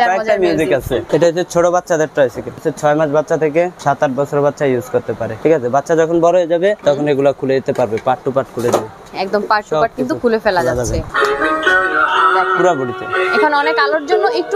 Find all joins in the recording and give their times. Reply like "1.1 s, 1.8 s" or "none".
1.0 s, 2.7 s, 3.8 s, 5.3 s, 6.8 s, 9.1 s, 11.1 s